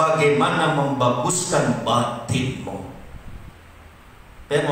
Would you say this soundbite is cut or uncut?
uncut